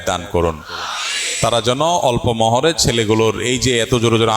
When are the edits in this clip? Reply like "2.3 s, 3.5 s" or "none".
none